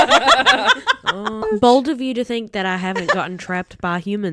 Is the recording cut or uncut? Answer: cut